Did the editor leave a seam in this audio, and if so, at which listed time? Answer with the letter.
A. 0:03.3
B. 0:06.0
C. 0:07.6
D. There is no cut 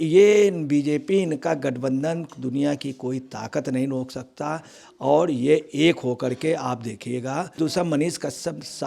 C